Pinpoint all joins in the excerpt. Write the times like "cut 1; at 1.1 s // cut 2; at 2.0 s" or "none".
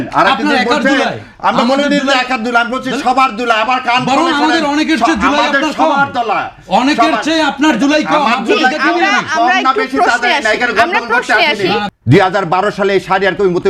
cut 1; at 11.9 s